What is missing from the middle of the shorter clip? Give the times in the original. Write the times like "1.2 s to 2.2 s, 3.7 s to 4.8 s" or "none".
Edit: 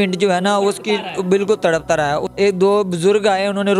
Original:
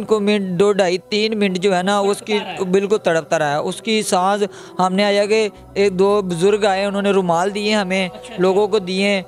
3.7 s to 5.7 s